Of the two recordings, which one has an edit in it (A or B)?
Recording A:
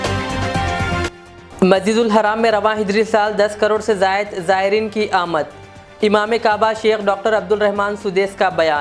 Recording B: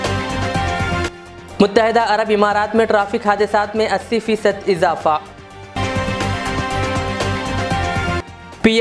B